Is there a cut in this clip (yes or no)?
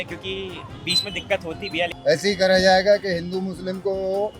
yes